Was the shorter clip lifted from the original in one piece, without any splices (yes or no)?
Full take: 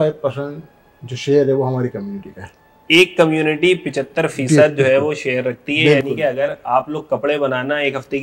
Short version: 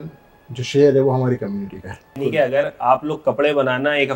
no